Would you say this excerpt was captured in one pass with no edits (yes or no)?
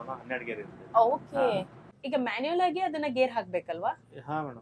yes